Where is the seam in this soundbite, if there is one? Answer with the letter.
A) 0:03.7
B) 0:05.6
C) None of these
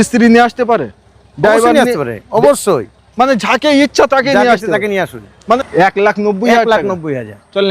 B